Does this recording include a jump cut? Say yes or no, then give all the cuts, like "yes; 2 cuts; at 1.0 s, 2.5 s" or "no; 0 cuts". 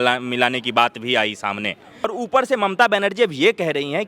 yes; 1 cut; at 2.2 s